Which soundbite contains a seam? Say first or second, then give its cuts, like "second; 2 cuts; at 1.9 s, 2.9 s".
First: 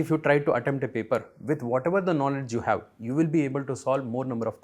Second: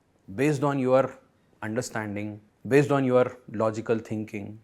second; 1 cut; at 2.5 s